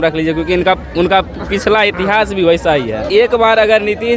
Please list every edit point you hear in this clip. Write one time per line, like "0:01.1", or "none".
0:03.1